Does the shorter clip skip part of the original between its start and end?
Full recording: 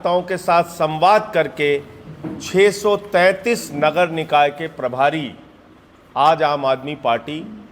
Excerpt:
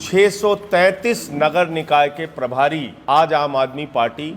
yes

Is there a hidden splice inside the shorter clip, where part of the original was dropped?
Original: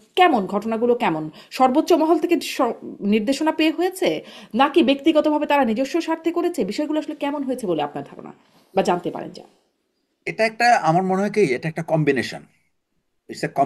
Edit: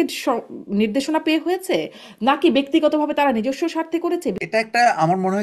yes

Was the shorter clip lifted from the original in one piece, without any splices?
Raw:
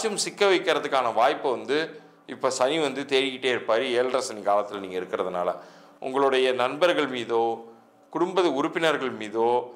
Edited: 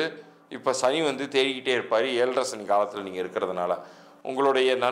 yes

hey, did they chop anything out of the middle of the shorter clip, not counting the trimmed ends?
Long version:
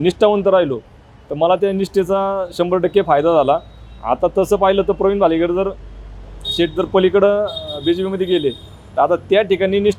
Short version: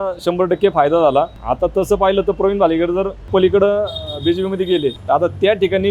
yes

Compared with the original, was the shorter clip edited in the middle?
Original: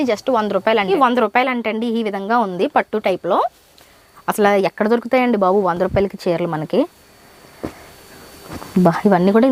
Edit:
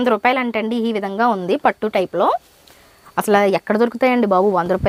no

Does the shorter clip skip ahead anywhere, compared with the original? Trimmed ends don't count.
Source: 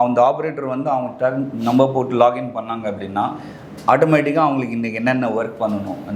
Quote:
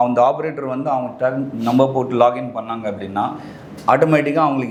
no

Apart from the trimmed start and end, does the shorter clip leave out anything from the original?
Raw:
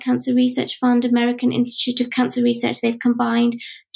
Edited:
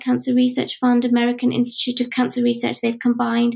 no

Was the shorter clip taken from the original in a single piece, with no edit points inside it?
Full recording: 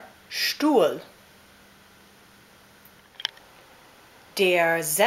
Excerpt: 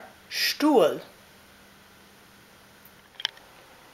yes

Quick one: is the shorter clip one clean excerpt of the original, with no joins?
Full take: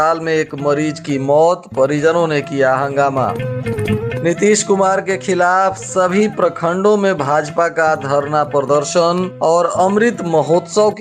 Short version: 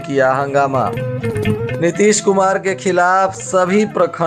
yes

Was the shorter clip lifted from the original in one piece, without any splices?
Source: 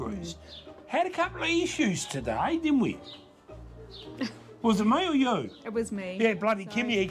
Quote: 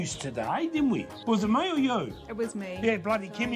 no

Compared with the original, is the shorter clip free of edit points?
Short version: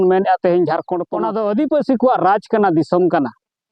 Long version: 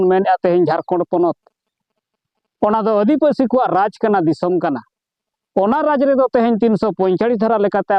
no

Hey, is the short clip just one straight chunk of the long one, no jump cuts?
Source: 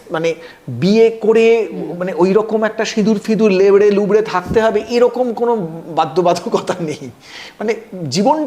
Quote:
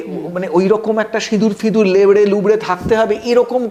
yes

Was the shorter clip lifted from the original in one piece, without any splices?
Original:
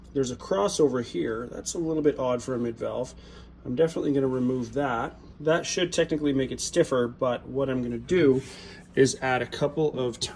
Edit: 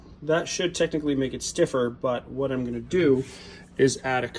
yes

